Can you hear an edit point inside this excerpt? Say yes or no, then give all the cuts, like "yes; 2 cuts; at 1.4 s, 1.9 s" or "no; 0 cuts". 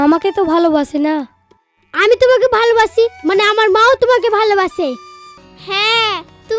yes; 1 cut; at 5.3 s